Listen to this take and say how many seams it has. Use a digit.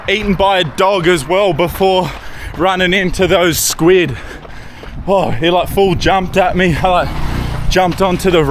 0